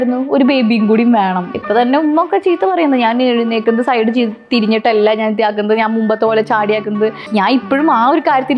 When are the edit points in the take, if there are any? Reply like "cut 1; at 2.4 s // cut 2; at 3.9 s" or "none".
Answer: cut 1; at 1.5 s // cut 2; at 7.2 s